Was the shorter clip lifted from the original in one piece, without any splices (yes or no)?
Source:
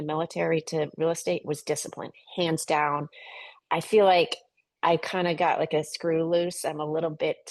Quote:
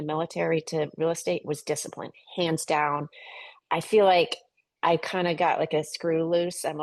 yes